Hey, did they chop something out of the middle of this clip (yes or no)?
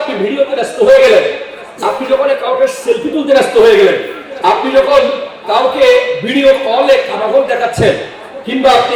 no